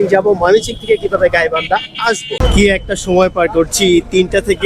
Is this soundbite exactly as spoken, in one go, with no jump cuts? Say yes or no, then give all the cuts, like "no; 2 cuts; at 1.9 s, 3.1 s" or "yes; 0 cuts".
no; 1 cut; at 2.4 s